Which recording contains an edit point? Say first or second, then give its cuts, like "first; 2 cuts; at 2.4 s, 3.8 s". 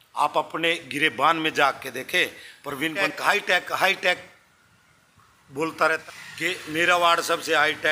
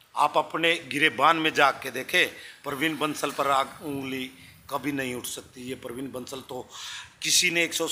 first; 2 cuts; at 3.1 s, 6.0 s